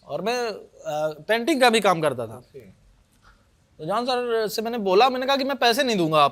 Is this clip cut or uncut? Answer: uncut